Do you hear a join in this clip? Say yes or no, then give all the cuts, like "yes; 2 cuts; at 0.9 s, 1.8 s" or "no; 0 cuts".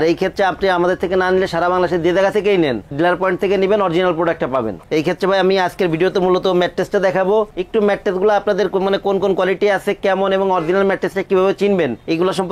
no; 0 cuts